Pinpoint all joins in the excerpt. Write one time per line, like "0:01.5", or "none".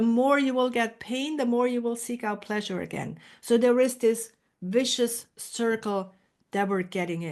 none